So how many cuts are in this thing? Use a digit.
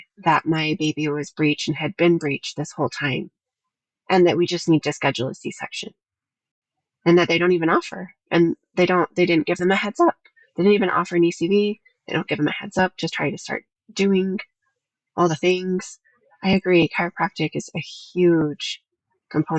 0